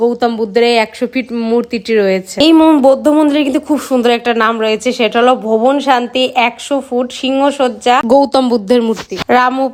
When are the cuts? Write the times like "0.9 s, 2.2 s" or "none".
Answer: none